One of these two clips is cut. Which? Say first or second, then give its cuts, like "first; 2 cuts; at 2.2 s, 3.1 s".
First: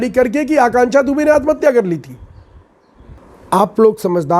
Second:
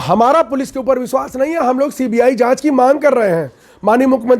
first; 1 cut; at 3.2 s